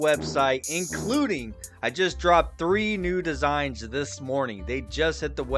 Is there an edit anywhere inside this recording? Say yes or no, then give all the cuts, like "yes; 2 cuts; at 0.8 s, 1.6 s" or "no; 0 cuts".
no; 0 cuts